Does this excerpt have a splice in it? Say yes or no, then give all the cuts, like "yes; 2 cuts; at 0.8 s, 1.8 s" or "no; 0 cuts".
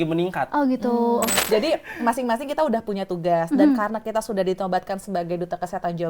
yes; 1 cut; at 1.4 s